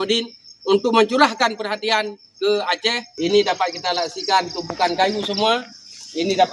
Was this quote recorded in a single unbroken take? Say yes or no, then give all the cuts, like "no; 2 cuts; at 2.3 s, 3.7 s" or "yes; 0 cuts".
no; 1 cut; at 3.1 s